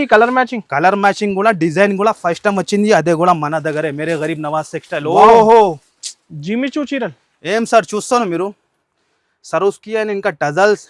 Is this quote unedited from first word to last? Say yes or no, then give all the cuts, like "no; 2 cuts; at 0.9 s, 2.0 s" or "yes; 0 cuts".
yes; 0 cuts